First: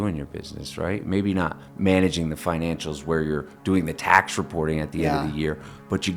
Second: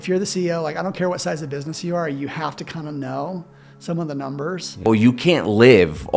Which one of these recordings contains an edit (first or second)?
second